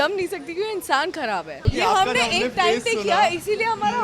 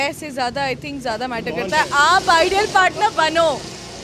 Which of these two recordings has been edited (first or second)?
first